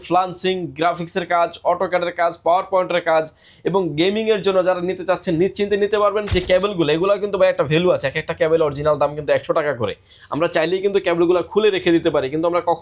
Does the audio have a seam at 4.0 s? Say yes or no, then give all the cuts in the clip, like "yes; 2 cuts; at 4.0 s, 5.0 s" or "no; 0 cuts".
no; 1 cut; at 6.3 s